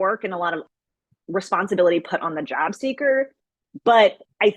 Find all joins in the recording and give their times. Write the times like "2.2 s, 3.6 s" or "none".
1.2 s

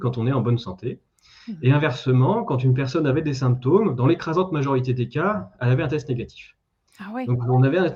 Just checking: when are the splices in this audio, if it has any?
none

